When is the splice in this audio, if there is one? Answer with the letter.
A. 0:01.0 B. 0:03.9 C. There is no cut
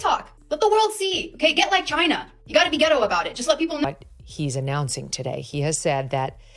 B